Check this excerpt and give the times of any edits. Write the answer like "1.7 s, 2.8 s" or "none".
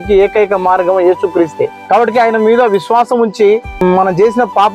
1.8 s, 3.8 s